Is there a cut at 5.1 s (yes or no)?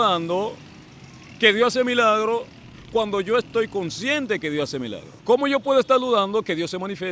yes